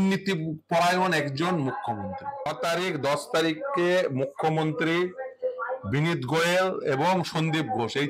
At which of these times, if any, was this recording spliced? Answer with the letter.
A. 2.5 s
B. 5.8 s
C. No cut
A